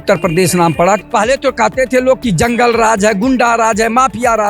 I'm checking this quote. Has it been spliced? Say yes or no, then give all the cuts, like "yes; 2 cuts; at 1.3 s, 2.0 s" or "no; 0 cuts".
yes; 1 cut; at 1.0 s